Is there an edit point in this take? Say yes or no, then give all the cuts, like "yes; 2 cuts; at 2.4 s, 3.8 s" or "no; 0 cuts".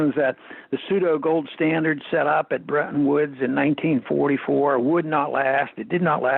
yes; 1 cut; at 4.8 s